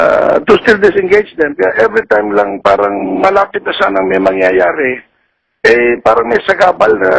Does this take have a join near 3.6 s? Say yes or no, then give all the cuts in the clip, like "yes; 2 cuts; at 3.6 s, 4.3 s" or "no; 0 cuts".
yes; 1 cut; at 3.6 s